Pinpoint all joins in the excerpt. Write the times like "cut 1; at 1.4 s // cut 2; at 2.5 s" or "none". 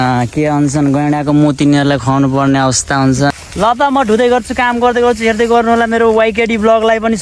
cut 1; at 1.7 s // cut 2; at 3.3 s